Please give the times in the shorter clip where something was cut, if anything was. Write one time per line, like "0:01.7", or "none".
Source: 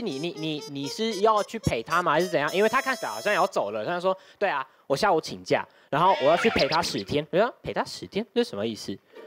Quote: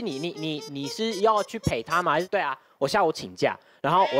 0:02.3

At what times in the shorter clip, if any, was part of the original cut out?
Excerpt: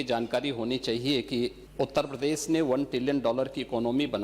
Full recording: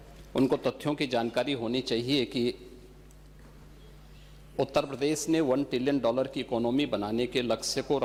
0:01.6

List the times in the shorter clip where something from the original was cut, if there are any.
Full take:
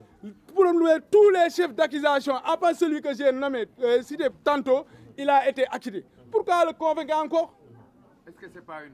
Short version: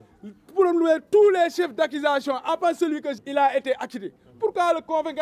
0:03.1

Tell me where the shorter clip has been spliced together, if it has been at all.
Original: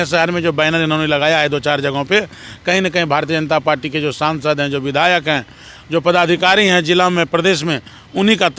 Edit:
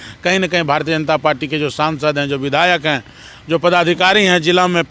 none

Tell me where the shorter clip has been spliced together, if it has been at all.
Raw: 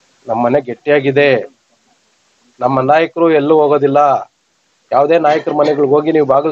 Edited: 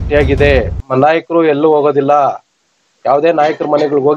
0:00.9

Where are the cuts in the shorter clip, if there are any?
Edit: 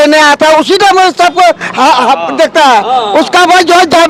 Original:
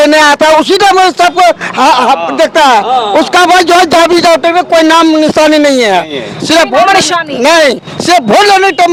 none

